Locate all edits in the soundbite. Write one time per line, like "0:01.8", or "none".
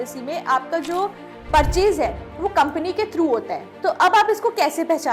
none